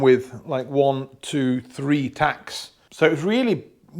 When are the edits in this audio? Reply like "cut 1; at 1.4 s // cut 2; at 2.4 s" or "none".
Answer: cut 1; at 2.8 s